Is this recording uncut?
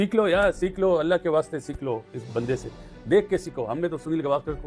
yes; 0 cuts

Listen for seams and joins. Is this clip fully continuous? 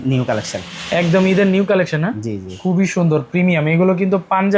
yes; 0 cuts

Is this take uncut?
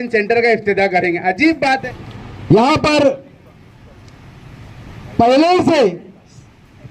no; 1 cut; at 1.8 s

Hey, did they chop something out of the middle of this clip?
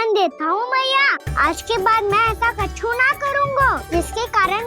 yes; 2 cuts; at 1.2 s, 3.8 s

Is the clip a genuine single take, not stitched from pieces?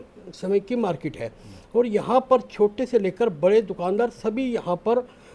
yes; 0 cuts

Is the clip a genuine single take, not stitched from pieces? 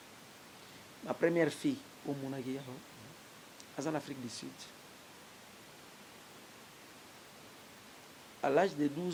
yes; 0 cuts

